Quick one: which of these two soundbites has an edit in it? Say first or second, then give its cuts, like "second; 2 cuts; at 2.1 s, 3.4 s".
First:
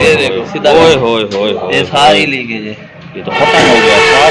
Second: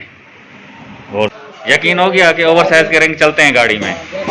second; 1 cut; at 1.4 s